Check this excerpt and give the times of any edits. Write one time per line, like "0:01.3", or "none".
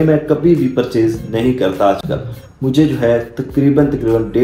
none